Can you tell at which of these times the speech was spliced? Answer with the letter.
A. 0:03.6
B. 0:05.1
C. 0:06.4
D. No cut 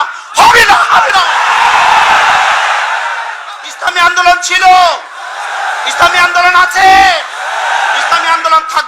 A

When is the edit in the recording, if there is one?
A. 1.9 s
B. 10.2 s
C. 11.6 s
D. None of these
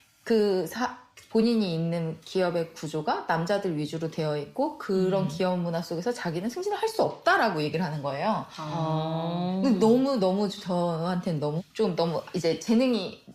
C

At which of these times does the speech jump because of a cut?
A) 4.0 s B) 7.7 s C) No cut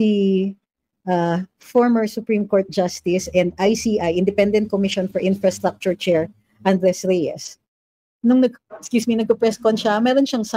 C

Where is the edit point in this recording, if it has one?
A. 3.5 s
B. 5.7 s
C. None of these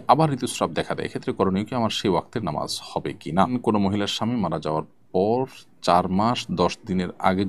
A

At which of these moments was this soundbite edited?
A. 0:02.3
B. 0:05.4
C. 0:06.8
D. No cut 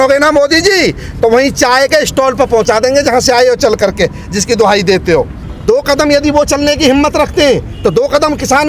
B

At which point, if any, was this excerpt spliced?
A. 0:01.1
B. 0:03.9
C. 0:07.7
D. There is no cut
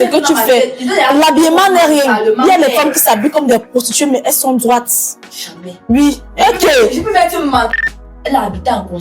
C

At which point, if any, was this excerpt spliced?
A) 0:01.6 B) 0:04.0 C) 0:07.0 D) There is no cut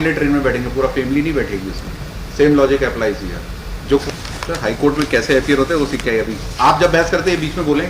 B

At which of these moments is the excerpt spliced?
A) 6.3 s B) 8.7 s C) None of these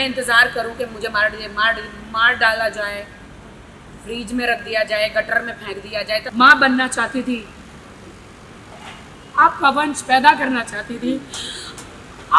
A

